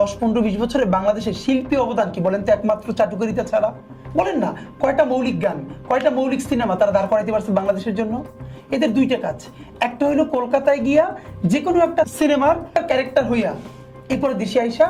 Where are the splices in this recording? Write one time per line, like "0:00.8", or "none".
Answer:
none